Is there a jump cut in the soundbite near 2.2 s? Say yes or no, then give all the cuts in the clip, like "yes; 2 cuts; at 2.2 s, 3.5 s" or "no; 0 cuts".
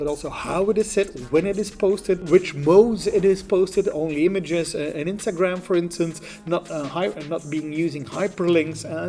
yes; 1 cut; at 2.2 s